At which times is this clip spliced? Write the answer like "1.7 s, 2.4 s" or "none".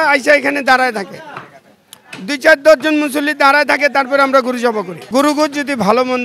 5.0 s